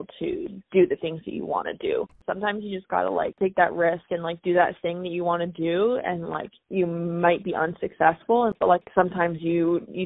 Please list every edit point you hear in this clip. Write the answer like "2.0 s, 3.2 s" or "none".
2.1 s